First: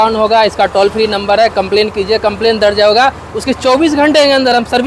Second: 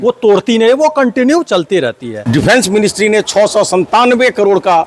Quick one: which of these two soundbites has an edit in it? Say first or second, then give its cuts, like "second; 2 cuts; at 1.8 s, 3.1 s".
second; 1 cut; at 2.1 s